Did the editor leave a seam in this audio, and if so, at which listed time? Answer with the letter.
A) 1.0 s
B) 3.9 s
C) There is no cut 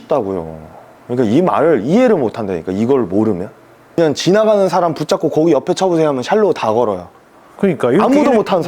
B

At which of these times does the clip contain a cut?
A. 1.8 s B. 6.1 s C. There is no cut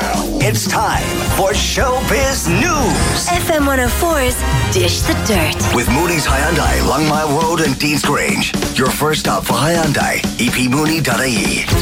C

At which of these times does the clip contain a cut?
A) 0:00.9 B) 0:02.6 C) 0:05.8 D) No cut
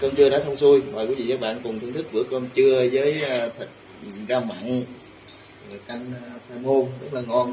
D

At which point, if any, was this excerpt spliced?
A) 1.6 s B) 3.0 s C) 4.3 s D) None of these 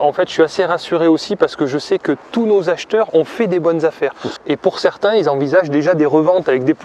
C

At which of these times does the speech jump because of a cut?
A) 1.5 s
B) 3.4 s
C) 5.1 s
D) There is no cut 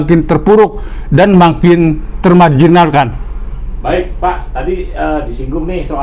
D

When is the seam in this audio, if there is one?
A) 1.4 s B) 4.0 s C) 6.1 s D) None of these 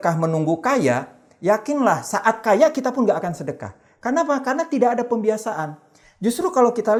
D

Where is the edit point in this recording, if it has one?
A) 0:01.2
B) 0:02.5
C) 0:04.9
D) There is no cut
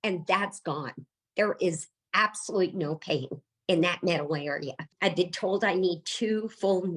C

